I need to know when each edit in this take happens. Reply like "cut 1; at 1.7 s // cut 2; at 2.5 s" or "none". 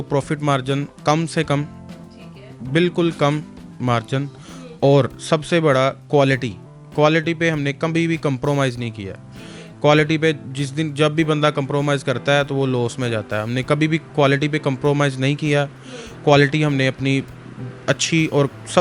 none